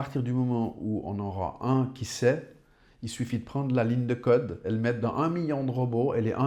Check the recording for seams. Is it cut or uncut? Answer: uncut